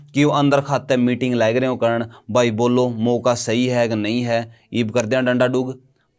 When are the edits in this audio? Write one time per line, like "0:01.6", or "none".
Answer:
none